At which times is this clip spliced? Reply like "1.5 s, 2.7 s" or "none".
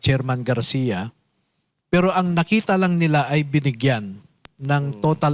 none

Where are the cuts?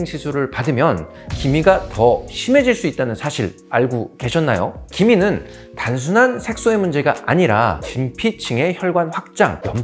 none

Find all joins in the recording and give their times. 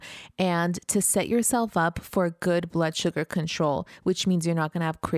none

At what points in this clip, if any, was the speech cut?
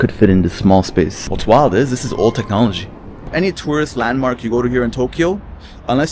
1.3 s, 3.3 s

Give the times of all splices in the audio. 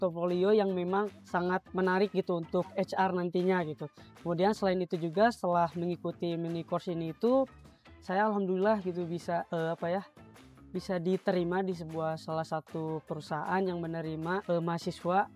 none

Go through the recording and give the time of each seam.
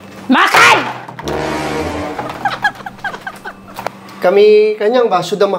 3.9 s

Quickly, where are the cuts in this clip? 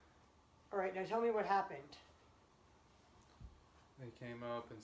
none

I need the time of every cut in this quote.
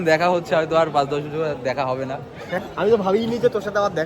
2.6 s

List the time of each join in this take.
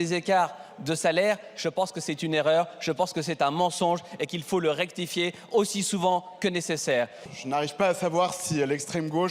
7.2 s

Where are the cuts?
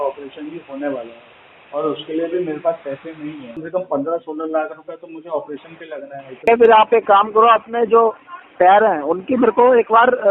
3.6 s, 6.5 s

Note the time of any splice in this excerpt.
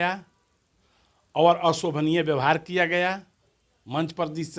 none

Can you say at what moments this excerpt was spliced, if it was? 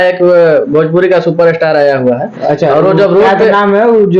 none

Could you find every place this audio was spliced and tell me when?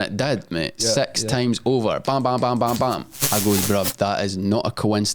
3.2 s

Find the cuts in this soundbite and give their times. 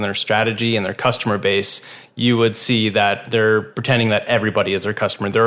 3.2 s

